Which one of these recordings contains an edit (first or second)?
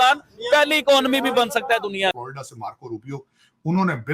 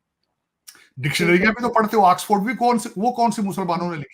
first